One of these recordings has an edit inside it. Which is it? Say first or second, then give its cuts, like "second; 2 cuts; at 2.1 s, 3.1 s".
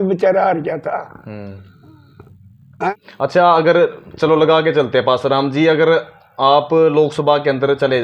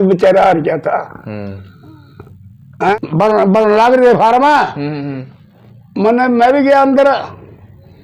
second; 1 cut; at 3.0 s